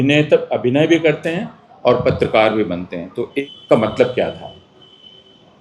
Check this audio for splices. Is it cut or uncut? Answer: cut